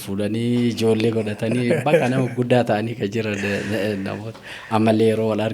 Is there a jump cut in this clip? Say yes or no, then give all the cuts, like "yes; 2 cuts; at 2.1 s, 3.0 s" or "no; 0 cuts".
no; 0 cuts